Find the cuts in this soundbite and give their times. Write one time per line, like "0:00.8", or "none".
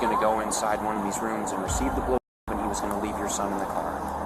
none